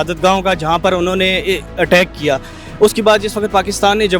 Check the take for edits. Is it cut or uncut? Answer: uncut